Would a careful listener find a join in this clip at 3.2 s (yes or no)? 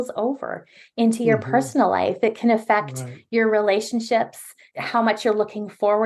no